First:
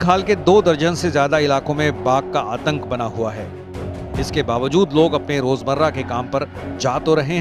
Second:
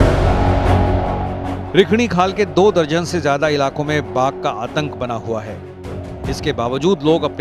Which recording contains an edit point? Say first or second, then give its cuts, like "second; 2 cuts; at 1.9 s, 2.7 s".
second; 1 cut; at 1.1 s